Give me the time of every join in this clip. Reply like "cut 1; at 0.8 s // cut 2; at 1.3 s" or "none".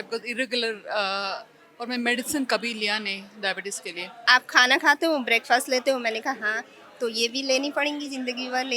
cut 1; at 4.1 s